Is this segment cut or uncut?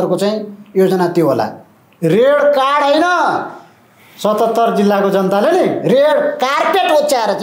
uncut